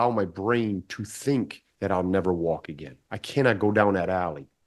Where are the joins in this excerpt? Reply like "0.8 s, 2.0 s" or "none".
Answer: none